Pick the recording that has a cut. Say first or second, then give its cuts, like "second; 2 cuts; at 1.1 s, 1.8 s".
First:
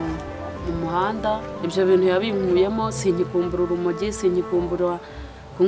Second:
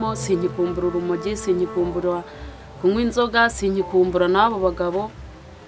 first; 1 cut; at 1.5 s